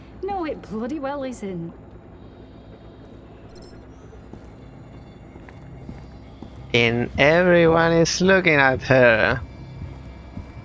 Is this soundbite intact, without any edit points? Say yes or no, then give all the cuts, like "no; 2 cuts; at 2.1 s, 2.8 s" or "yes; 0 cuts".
yes; 0 cuts